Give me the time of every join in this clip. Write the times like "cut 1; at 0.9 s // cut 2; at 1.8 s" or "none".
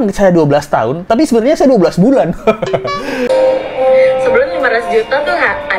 cut 1; at 3.3 s